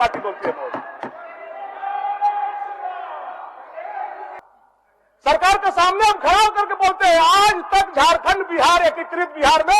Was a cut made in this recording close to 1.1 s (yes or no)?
no